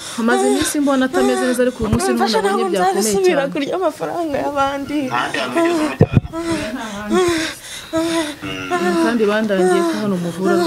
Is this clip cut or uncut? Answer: uncut